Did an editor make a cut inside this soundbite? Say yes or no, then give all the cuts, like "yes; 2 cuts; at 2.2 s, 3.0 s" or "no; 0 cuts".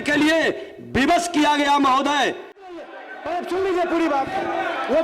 yes; 1 cut; at 2.7 s